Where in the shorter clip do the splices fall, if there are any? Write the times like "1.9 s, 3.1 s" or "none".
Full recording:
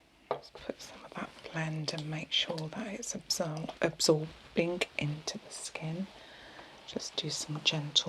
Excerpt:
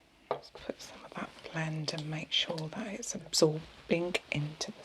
3.3 s